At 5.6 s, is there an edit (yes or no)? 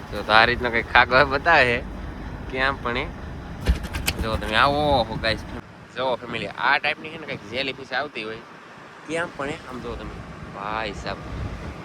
yes